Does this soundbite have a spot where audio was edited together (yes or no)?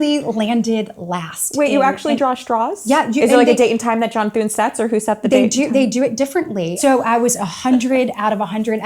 yes